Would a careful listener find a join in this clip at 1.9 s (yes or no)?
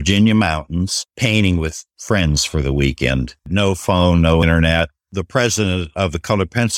yes